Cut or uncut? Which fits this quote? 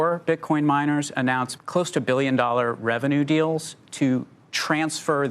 uncut